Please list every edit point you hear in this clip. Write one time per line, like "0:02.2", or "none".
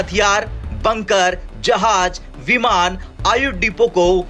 none